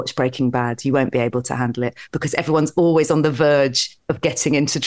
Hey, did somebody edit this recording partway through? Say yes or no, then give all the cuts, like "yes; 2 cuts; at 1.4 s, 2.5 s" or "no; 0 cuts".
no; 0 cuts